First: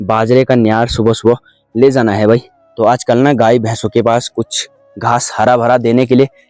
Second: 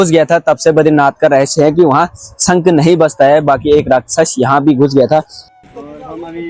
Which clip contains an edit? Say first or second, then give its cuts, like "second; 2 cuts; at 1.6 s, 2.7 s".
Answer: second; 1 cut; at 5.4 s